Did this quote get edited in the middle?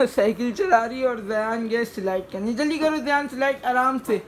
no; 0 cuts

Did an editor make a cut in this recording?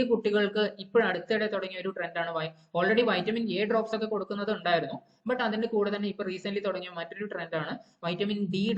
no; 0 cuts

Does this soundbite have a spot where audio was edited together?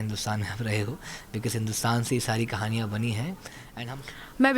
yes; 1 cut; at 3.6 s

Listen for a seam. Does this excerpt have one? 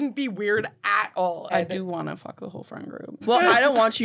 yes; 2 cuts; at 1.5 s, 3.2 s

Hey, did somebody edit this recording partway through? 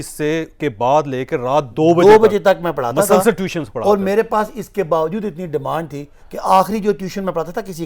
no; 0 cuts

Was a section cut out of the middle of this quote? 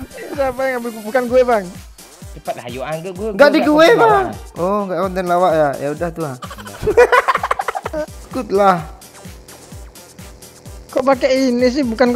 yes; 1 cut; at 8.2 s

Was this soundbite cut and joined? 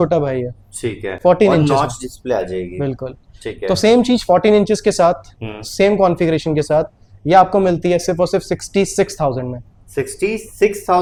no; 0 cuts

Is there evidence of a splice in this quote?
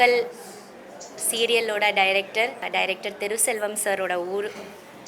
yes; 1 cut; at 2.6 s

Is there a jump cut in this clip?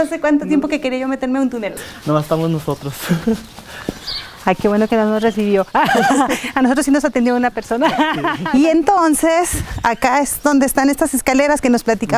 yes; 2 cuts; at 1.7 s, 8.3 s

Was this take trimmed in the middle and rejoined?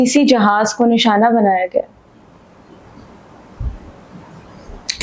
no; 0 cuts

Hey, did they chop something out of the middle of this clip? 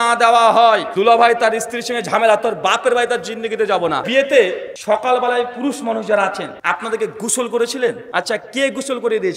yes; 5 cuts; at 0.9 s, 4.0 s, 4.7 s, 6.5 s, 8.0 s

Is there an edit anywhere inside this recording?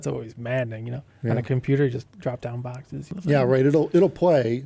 yes; 1 cut; at 3.1 s

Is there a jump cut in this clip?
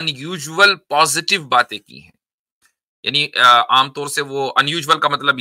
no; 0 cuts

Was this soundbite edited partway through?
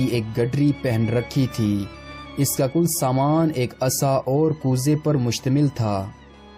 no; 0 cuts

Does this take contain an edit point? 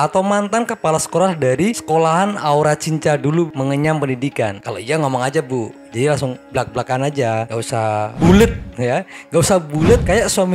no; 0 cuts

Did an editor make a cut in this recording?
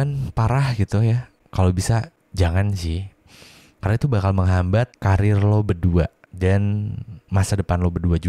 yes; 4 cuts; at 1.4 s, 2.2 s, 4.9 s, 6.2 s

